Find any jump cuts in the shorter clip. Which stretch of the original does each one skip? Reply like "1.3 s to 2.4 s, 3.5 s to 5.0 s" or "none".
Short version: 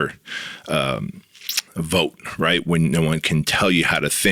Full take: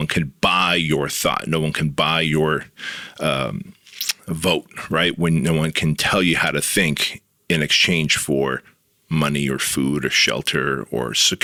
none